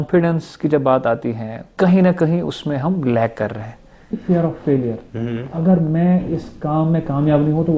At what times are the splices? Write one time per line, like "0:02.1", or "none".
0:01.7
0:04.2